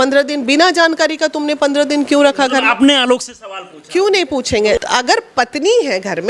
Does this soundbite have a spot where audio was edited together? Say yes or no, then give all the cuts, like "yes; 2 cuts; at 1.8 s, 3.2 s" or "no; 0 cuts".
yes; 1 cut; at 4.8 s